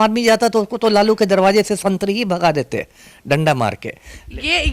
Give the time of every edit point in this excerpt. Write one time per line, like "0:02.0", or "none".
none